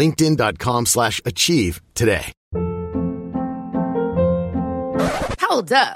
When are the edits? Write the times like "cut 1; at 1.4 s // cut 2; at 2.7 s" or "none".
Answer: cut 1; at 2.3 s